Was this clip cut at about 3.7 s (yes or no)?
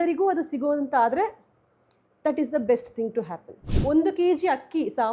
yes